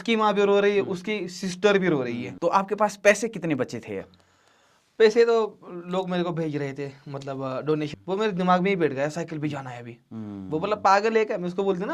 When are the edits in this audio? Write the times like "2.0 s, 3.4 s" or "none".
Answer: 2.3 s, 7.9 s